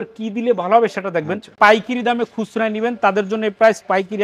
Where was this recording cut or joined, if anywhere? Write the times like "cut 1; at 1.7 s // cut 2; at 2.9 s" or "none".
cut 1; at 1.5 s